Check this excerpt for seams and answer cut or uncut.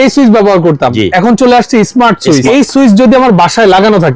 cut